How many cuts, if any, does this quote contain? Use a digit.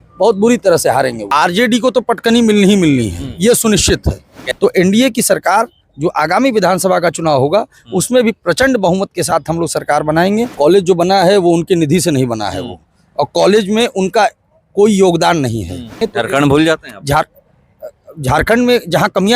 4